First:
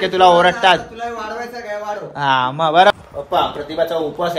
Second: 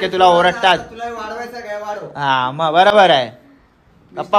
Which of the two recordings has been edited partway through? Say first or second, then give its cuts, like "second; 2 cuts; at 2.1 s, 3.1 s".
first; 1 cut; at 2.9 s